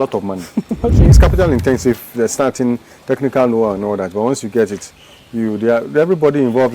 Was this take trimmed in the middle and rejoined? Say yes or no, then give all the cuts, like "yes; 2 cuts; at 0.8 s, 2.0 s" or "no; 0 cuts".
yes; 1 cut; at 1.1 s